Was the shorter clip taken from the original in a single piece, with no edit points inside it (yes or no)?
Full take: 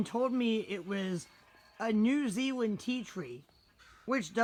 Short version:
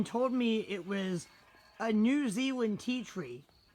yes